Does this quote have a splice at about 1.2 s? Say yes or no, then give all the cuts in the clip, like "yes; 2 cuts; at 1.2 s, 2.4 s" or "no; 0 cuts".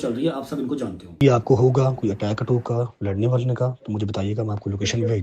yes; 1 cut; at 1.2 s